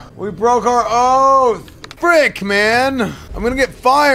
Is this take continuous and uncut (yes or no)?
no